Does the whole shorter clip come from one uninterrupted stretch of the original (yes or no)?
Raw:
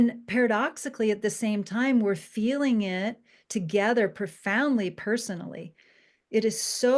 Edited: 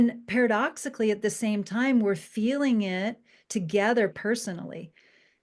no